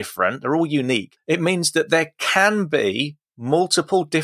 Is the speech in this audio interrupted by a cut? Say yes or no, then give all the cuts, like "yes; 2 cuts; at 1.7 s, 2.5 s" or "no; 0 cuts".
yes; 1 cut; at 1.1 s